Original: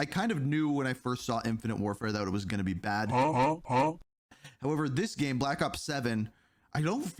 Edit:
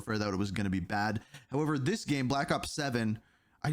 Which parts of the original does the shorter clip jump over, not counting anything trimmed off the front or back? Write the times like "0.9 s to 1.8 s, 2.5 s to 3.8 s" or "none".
3.1 s to 4.2 s

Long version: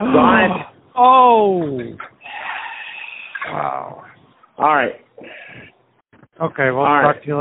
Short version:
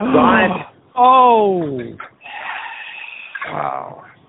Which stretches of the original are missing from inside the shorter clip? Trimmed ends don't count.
none

